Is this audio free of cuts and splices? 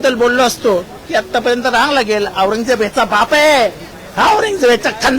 yes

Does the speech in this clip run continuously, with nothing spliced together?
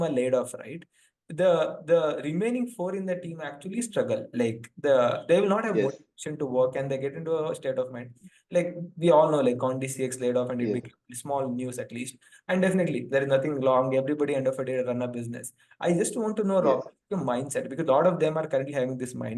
yes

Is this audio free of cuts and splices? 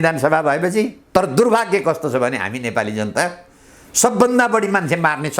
no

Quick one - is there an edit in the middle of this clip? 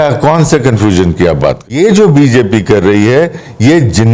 yes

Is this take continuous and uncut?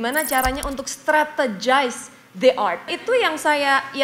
no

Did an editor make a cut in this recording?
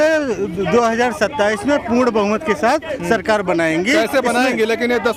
no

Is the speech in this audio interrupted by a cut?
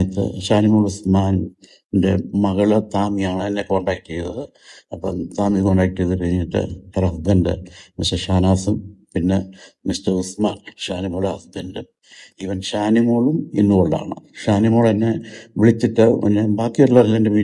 no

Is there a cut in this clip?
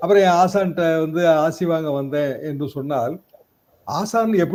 no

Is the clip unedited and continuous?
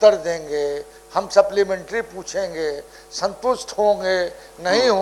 yes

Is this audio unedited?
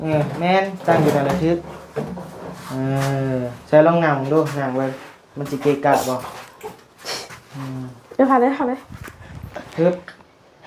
yes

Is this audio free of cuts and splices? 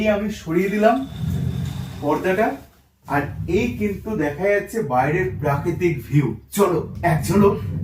yes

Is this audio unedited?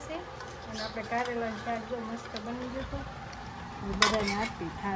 yes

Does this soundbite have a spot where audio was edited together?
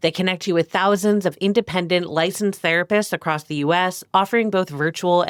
no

